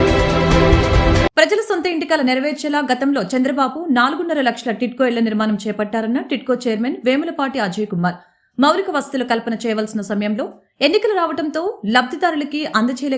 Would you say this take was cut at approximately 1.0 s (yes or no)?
yes